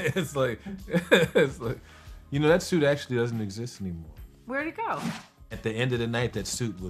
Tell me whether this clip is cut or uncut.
cut